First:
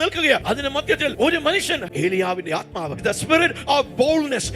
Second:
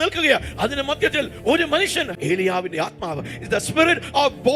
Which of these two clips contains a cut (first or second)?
first